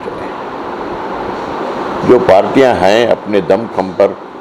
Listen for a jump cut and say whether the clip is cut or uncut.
uncut